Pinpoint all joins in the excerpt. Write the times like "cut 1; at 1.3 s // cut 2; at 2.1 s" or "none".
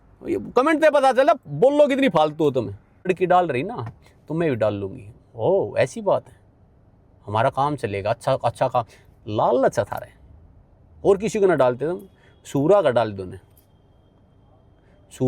cut 1; at 3.1 s